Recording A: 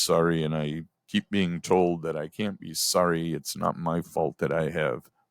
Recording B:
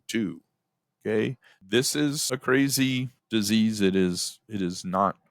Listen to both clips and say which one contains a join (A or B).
B